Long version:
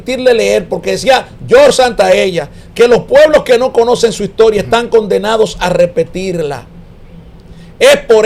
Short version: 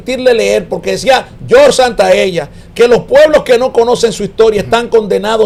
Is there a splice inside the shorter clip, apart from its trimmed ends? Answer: no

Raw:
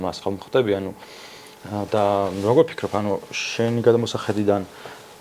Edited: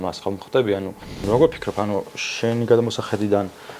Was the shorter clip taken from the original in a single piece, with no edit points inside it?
no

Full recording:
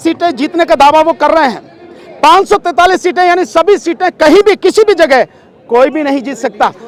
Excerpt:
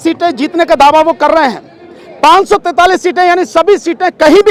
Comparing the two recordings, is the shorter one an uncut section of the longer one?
yes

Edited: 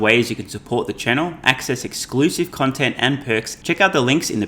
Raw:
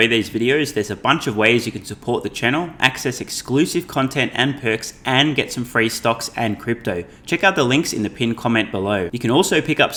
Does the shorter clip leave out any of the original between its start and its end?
yes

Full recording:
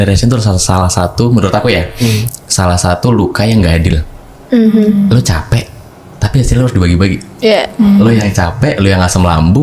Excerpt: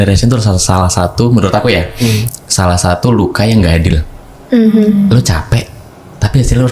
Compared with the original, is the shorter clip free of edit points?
yes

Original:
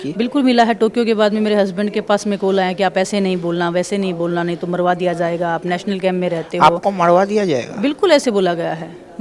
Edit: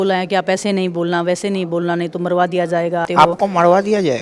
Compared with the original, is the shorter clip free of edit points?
no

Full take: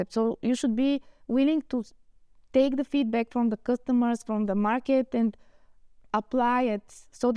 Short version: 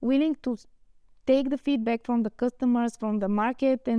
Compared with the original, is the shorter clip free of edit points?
yes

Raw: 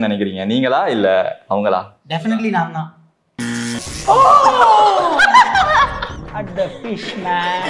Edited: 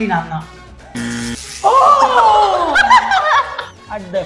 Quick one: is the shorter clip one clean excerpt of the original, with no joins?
yes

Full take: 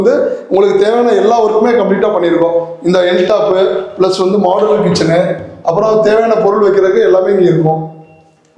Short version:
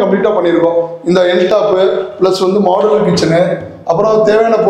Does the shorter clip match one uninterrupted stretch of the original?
yes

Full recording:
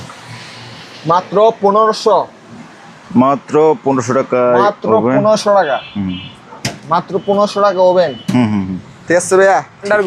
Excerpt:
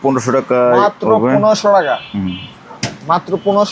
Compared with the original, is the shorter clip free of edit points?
yes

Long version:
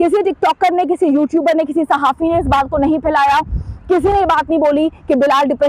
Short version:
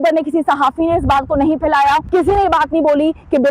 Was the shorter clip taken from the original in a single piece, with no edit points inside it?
no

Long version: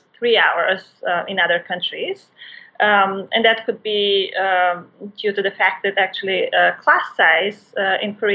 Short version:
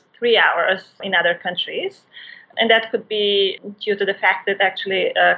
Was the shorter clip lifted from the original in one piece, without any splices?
no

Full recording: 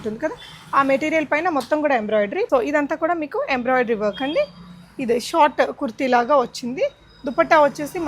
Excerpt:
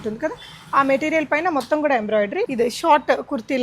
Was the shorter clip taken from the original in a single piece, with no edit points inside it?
no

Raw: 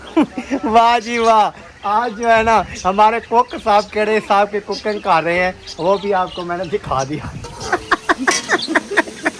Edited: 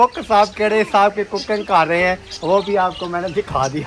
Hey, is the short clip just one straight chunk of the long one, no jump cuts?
yes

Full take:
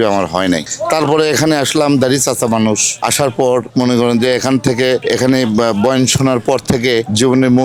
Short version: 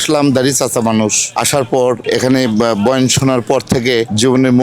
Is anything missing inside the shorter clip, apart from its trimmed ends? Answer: yes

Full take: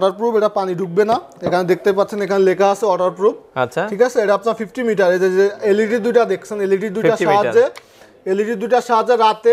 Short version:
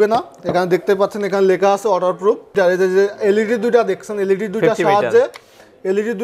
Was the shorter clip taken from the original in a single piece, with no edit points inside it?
no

